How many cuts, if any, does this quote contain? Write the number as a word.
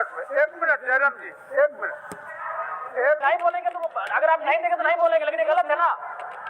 one